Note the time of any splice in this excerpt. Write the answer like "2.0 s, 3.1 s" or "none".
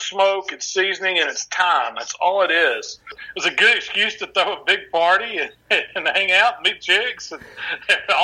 3.2 s

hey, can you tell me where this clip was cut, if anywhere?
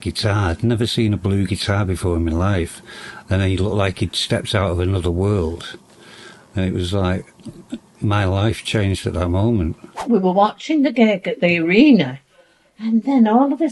10.0 s

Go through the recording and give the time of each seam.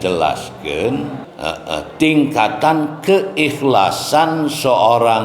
1.2 s

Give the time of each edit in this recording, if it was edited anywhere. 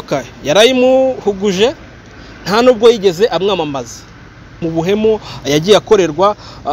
4.6 s

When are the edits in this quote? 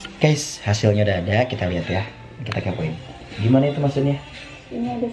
none

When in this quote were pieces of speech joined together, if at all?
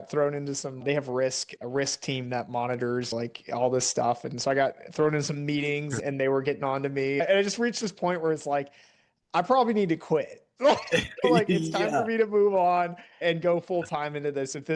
none

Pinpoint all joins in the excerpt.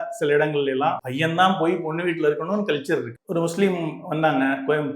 1.1 s, 3.2 s

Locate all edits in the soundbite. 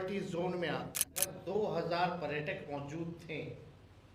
1.2 s

